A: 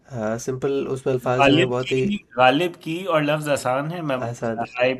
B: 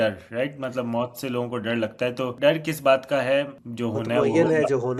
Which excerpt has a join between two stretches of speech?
B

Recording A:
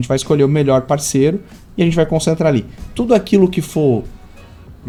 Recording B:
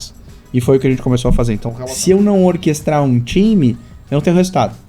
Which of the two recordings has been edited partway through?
B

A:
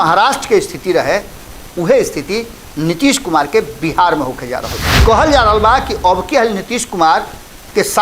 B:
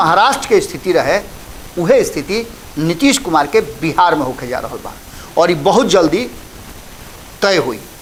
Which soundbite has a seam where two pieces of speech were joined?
A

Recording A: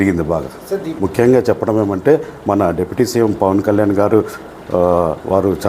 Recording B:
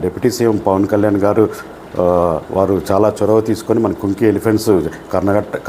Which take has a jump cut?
A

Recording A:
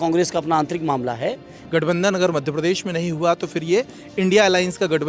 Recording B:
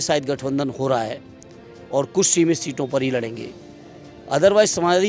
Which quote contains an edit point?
A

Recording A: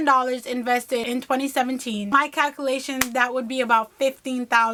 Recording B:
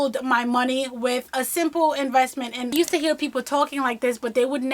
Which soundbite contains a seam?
B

